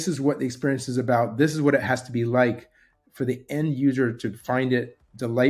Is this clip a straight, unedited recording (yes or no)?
yes